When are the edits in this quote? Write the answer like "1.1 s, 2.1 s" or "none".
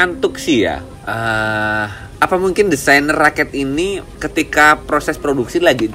0.9 s, 2.0 s